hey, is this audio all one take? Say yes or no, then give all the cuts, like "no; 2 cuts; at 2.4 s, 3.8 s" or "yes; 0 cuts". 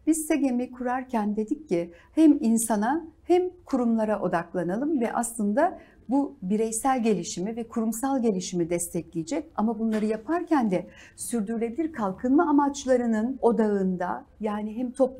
no; 1 cut; at 13.4 s